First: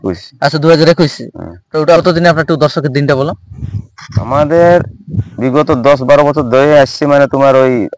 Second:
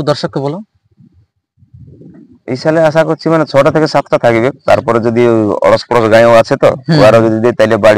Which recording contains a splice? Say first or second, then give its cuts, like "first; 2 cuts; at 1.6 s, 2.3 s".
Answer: first; 1 cut; at 2.0 s